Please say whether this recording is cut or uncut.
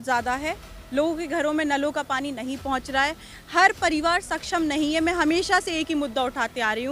uncut